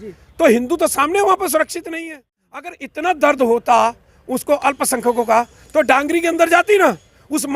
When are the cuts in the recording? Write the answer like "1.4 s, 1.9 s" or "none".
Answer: 2.8 s